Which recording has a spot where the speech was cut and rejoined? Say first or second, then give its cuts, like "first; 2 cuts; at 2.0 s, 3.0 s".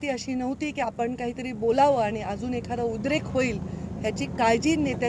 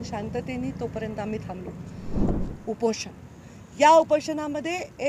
second; 1 cut; at 2.4 s